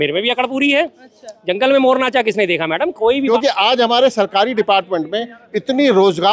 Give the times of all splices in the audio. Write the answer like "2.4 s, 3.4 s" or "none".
3.3 s